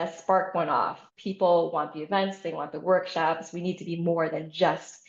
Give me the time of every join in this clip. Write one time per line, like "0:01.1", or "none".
0:01.0

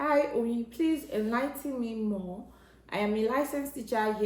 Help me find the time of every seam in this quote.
none

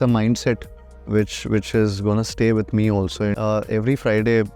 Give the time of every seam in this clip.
0:03.3

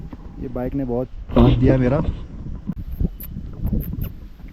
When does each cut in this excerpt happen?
0:02.8

